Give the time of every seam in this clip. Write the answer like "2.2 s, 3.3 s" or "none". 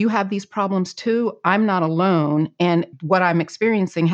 3.0 s